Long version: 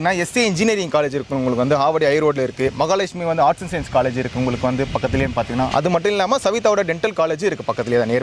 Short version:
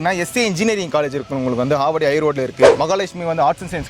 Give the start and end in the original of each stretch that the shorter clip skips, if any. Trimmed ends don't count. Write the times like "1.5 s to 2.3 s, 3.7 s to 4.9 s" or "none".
none

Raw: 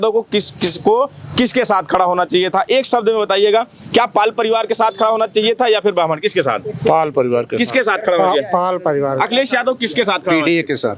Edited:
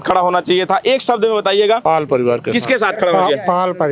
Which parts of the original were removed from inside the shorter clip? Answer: 3.7 s to 6.9 s

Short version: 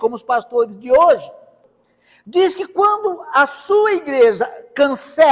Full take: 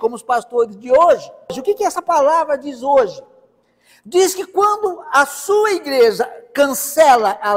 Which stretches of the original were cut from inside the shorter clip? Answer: 1.5 s to 3.2 s

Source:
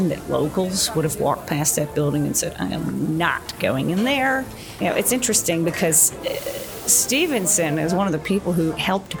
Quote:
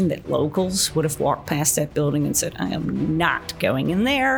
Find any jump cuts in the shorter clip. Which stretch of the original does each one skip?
none

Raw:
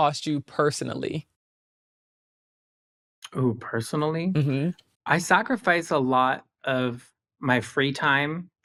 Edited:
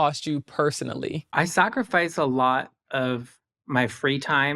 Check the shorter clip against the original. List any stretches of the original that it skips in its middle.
1.2 s to 4.9 s

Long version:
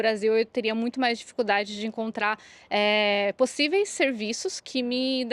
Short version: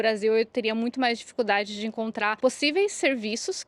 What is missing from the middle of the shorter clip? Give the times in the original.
2.4 s to 3.3 s

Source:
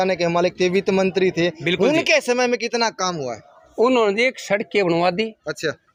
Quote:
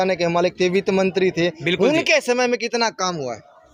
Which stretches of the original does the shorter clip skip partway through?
none

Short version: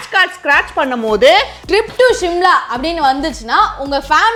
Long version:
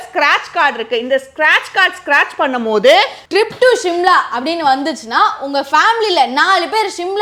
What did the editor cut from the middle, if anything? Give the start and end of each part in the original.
none

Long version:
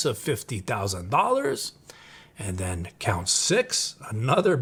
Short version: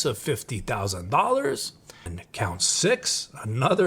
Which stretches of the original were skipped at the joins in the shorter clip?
2.2 s to 2.9 s

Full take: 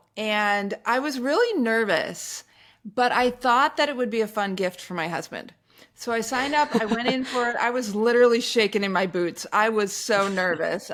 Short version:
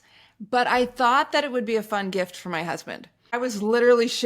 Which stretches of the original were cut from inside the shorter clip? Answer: 5.8 s to 7.7 s

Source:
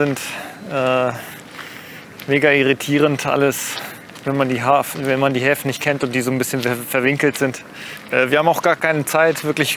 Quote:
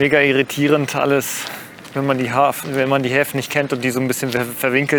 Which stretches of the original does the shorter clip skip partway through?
none

